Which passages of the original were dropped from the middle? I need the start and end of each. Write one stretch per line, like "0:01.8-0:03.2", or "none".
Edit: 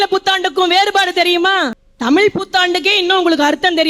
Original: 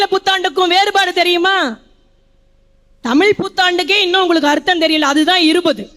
0:01.8-0:02.9